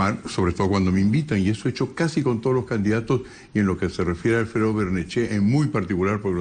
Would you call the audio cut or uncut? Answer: cut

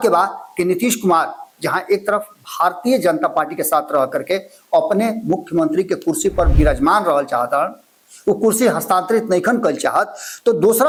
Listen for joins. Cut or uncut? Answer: uncut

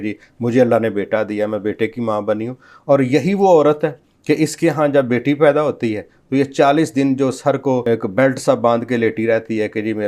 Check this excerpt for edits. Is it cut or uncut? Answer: cut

